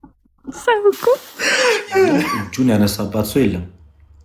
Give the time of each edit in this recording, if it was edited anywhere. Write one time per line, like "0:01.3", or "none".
0:02.4